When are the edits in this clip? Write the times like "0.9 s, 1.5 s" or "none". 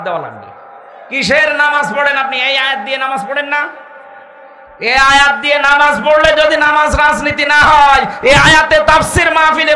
none